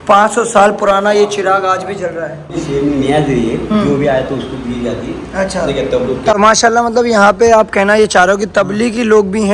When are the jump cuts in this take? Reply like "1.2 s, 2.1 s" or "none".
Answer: 2.6 s, 6.3 s